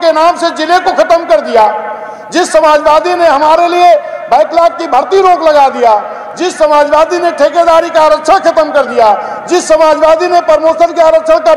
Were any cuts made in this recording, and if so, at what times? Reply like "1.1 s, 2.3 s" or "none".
none